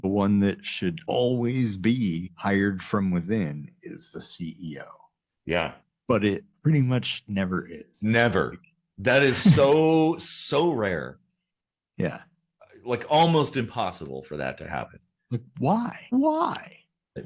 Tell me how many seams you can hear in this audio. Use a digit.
2